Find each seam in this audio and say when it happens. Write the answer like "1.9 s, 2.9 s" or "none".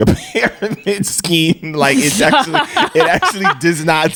none

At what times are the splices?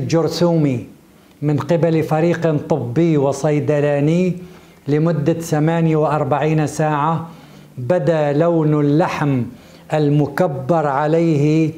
none

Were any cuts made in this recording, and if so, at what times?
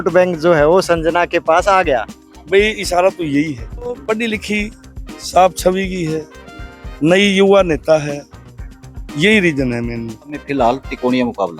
4.0 s, 10.4 s

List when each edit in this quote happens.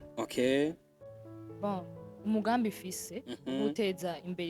0.9 s

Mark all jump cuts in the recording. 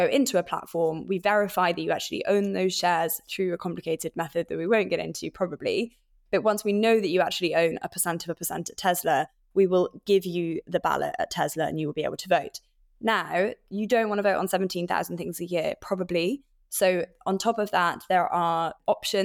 none

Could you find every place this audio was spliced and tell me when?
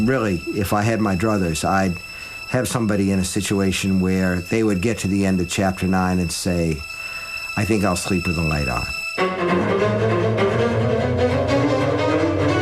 8.9 s

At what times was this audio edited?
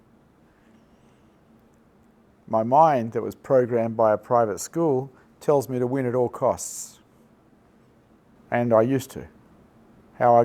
8.3 s

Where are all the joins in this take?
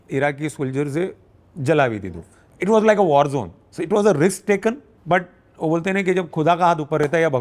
2.4 s, 4.9 s

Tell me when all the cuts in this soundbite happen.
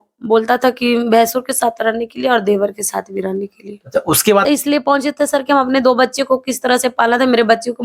4.4 s

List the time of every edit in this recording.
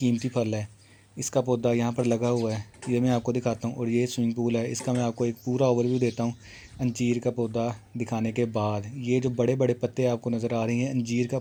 none

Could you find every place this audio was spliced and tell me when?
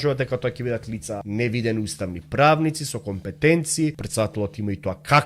1.2 s, 4.0 s

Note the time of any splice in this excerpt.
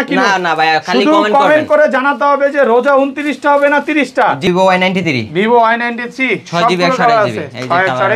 4.4 s

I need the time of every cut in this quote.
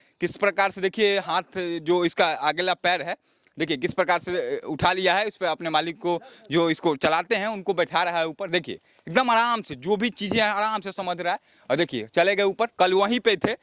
none

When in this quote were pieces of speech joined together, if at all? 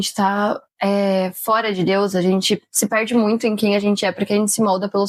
none

